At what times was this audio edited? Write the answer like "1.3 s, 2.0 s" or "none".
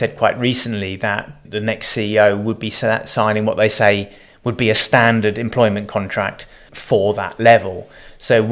1.3 s, 6.6 s

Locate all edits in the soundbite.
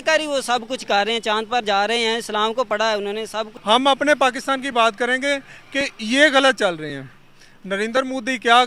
3.5 s

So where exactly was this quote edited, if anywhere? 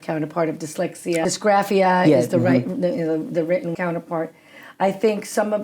1.2 s, 3.7 s

